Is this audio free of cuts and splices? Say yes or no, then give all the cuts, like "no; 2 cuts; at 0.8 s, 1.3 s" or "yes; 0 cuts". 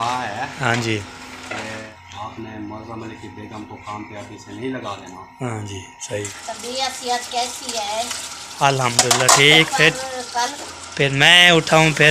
no; 3 cuts; at 1.9 s, 6.4 s, 10.5 s